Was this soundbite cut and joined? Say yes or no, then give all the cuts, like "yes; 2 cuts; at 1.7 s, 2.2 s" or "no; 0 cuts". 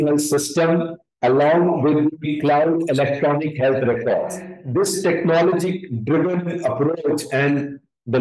yes; 1 cut; at 4.5 s